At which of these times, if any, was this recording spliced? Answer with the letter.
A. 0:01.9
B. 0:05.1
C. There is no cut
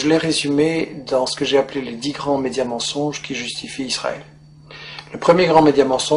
A